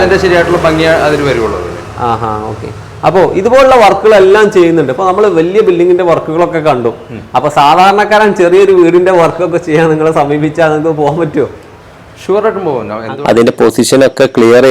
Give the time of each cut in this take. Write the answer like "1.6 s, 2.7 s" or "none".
13.1 s